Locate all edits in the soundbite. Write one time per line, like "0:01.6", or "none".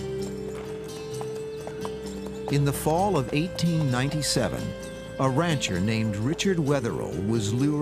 none